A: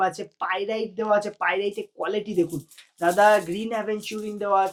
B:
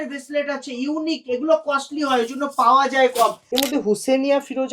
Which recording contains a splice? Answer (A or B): B